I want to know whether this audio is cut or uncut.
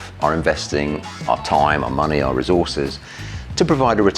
uncut